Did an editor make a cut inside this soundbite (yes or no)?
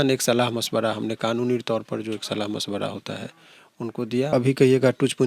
yes